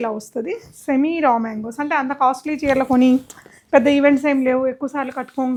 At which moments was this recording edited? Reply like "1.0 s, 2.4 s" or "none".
none